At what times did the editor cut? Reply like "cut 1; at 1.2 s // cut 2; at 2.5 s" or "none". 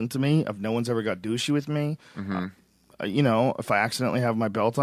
cut 1; at 1.9 s